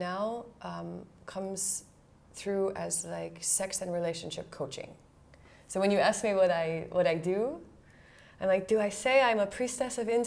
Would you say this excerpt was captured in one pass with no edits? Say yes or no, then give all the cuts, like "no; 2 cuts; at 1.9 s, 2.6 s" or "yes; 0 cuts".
yes; 0 cuts